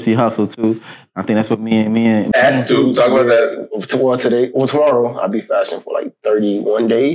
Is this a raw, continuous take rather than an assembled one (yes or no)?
no